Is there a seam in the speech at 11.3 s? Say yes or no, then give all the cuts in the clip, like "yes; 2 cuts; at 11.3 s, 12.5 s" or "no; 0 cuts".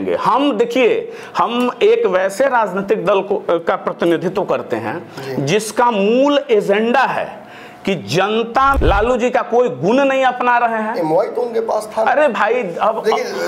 no; 1 cut; at 8.8 s